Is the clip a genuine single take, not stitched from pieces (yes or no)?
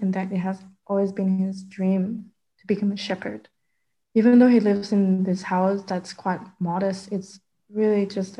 yes